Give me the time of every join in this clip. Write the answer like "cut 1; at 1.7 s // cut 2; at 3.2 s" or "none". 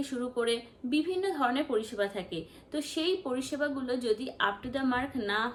none